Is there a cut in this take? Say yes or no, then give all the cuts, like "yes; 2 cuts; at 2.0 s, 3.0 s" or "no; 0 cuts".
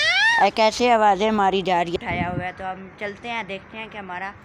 yes; 1 cut; at 2.0 s